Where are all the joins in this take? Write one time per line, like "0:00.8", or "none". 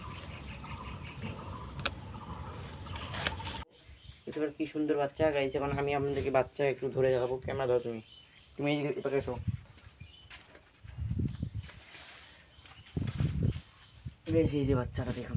0:03.7